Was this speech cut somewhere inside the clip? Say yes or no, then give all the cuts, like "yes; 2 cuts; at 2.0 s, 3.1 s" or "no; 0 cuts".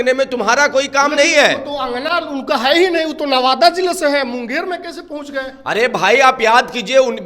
no; 0 cuts